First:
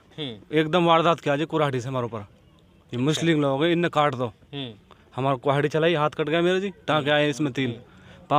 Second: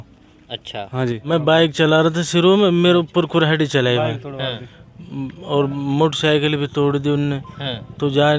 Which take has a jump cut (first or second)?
second